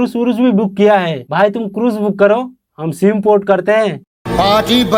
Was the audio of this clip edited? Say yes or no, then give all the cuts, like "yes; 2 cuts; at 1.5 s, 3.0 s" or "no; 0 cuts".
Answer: no; 0 cuts